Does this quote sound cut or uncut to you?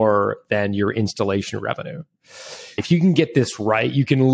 cut